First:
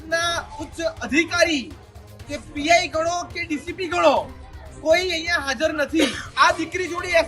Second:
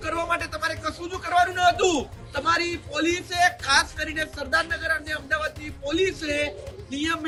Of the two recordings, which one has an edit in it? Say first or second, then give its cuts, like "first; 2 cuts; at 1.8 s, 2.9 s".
first; 1 cut; at 6.2 s